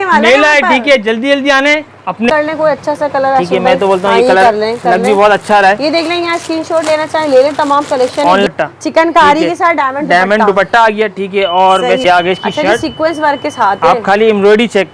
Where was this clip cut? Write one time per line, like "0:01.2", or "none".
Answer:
0:02.3
0:08.5
0:12.0